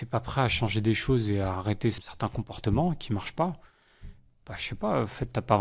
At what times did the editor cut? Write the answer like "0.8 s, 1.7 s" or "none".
2.1 s